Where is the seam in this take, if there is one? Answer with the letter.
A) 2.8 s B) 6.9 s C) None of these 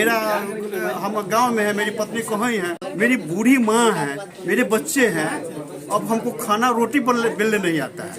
A